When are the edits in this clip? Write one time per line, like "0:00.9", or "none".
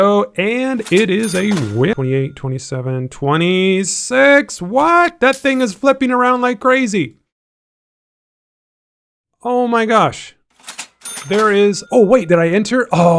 0:01.9
0:11.8